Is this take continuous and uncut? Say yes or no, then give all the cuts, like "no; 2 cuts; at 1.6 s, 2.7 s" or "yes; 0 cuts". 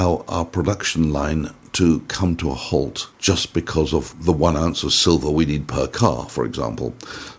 no; 2 cuts; at 3.1 s, 4.1 s